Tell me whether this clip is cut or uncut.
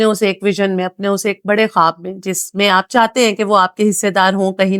uncut